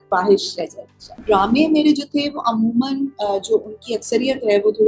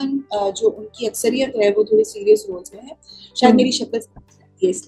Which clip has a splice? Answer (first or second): first